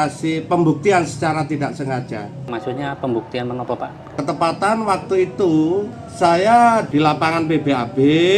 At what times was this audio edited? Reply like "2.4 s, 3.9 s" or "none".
2.5 s, 4.1 s, 5.9 s, 6.9 s